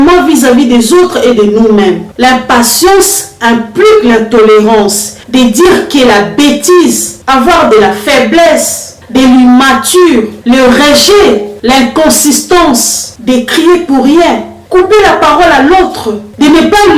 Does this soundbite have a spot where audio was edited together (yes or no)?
yes